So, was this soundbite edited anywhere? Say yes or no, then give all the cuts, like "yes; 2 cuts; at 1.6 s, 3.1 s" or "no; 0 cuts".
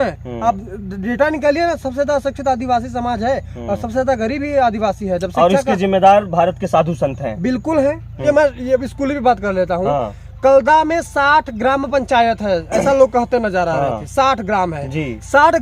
yes; 1 cut; at 8.2 s